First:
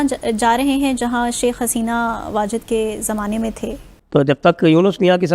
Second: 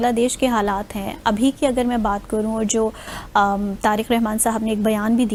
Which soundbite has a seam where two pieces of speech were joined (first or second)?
first